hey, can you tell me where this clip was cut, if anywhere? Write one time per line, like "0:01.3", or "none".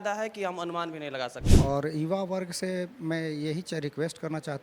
0:01.4